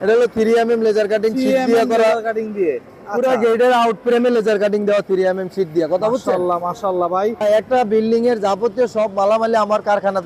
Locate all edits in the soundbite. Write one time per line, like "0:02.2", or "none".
0:07.8